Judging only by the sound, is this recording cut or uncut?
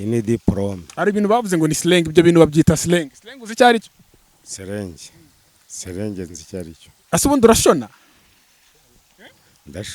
cut